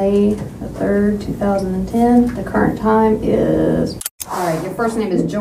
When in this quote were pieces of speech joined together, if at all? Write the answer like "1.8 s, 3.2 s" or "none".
4.0 s